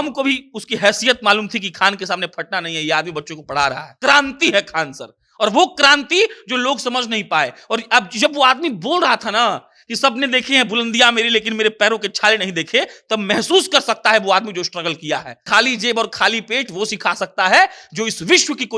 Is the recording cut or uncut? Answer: cut